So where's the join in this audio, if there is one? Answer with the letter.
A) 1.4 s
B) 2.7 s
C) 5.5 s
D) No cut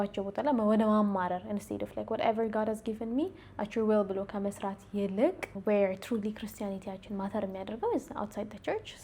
C